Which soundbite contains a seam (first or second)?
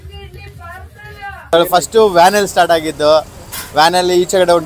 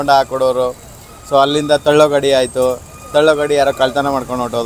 first